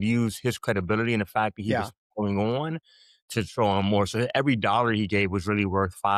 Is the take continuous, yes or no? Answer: yes